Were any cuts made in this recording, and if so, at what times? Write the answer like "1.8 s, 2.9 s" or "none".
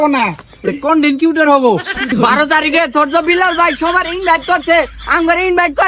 2.1 s